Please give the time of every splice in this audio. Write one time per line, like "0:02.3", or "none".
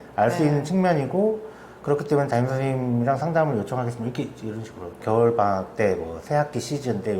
0:05.0